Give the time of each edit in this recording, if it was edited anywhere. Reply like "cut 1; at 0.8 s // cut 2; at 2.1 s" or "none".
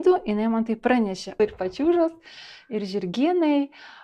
cut 1; at 1.4 s